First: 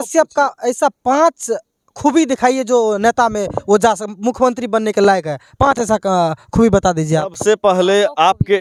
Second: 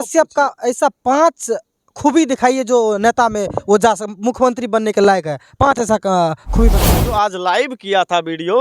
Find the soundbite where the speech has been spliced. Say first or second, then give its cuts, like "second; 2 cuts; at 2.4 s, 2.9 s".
second; 1 cut; at 6.7 s